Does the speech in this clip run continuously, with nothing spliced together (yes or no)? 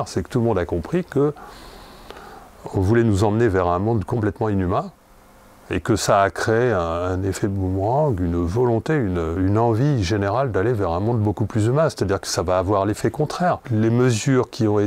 no